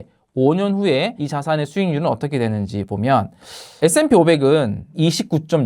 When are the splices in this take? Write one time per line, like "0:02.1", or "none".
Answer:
0:01.2
0:03.8
0:04.9

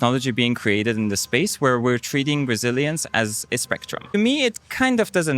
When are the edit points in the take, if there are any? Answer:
0:04.1

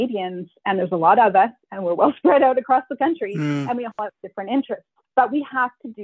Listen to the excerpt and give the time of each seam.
0:04.9

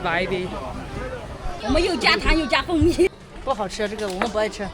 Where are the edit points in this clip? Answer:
0:01.5

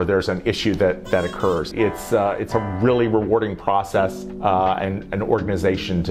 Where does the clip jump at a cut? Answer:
0:01.7
0:04.3

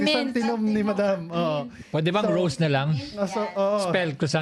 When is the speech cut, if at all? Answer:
none

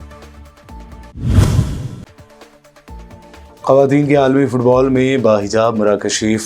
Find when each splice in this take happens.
0:01.1

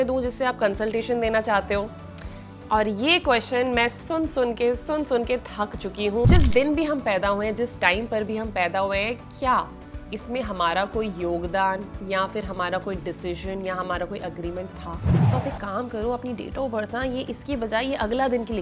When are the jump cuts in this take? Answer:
0:06.3
0:15.1

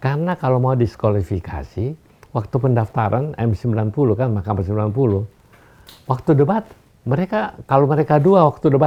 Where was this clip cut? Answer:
none

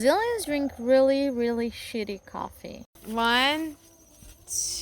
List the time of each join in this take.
0:02.8

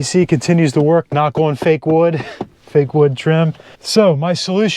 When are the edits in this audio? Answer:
0:03.7

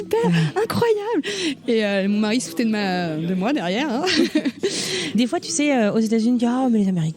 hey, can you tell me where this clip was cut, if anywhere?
0:04.9

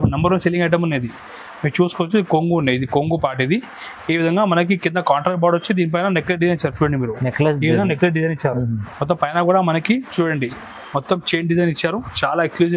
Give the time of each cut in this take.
none

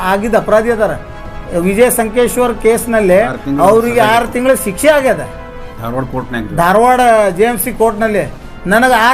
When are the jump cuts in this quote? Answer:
none

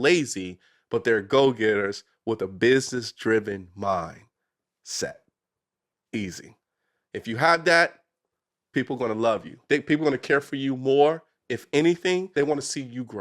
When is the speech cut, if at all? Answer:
0:09.6
0:12.3

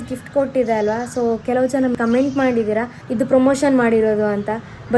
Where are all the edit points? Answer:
0:01.9
0:03.0

